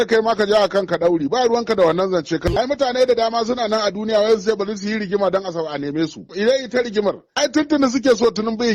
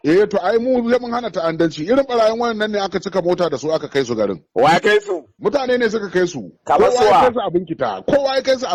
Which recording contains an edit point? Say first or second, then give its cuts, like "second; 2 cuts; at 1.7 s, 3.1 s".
first; 3 cuts; at 2.4 s, 6.2 s, 7.3 s